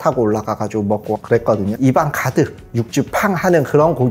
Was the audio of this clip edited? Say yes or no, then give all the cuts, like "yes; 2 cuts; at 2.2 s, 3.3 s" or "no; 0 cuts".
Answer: yes; 1 cut; at 1.7 s